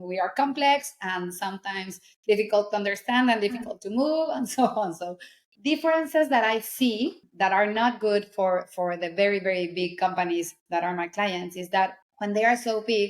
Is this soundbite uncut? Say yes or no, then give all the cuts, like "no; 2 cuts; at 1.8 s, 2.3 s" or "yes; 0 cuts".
no; 2 cuts; at 5.5 s, 7.2 s